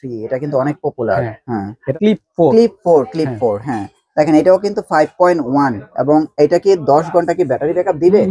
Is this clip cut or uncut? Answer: cut